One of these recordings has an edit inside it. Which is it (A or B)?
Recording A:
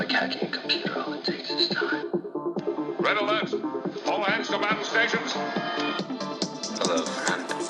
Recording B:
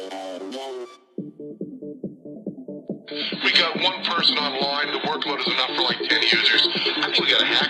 B